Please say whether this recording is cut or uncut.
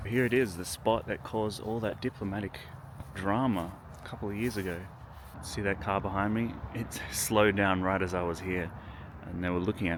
uncut